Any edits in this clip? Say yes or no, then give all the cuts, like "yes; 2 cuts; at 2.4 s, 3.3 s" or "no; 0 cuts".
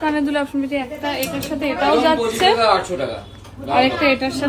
no; 0 cuts